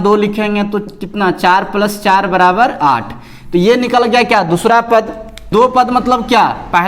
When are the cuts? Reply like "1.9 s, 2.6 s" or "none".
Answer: 5.5 s